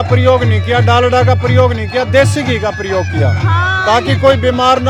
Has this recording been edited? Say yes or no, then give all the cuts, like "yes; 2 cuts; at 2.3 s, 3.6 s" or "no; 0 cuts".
no; 0 cuts